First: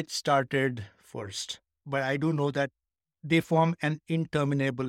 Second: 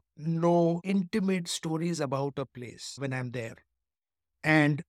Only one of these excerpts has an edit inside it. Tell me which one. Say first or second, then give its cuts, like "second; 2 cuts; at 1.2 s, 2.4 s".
first; 1 cut; at 1.8 s